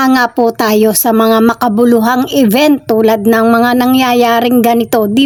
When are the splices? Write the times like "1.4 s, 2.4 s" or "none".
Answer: none